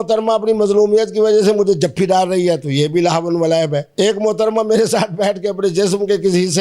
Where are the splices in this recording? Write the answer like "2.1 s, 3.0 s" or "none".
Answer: 3.8 s